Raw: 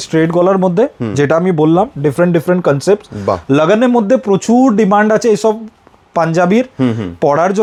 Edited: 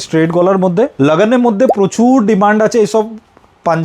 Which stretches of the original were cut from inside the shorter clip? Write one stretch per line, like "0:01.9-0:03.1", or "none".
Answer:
0:00.9-0:03.4